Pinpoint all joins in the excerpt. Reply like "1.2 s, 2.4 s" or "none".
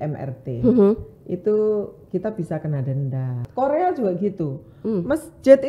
3.3 s

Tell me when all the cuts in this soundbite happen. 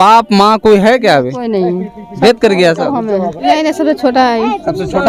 3.5 s

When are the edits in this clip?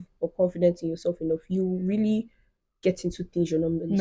none

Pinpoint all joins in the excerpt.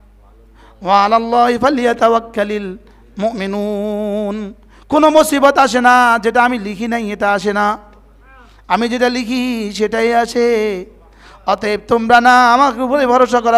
none

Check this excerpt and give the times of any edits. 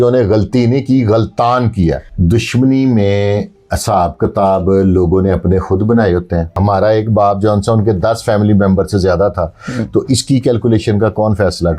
2.1 s, 6.5 s

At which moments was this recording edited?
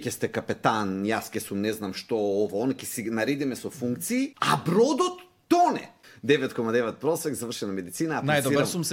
4.4 s, 6.1 s

